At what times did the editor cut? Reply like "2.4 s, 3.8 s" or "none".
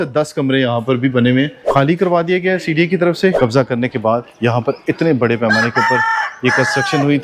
1.6 s, 3.4 s